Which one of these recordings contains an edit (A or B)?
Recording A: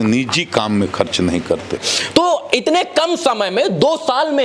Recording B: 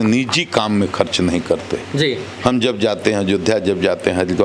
A